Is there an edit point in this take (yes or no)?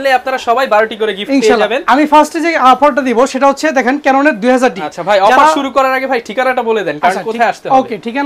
no